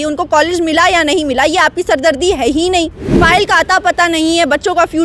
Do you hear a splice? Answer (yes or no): yes